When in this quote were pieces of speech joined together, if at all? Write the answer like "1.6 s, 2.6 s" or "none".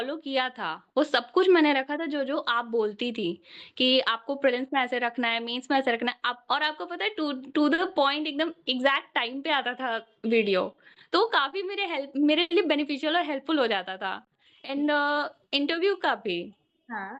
none